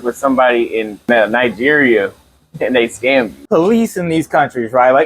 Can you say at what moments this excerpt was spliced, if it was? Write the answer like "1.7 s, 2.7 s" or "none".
1.1 s, 3.4 s